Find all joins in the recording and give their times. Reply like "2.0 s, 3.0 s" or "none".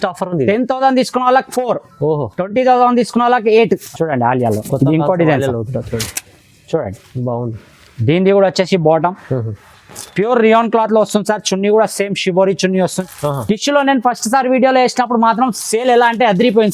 3.9 s, 13.0 s